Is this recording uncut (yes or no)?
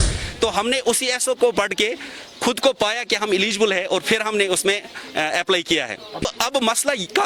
no